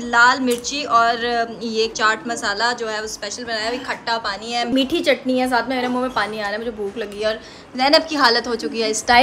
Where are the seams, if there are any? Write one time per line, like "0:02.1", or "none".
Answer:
none